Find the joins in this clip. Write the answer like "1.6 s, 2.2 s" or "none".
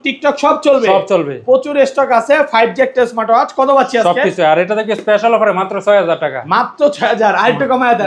none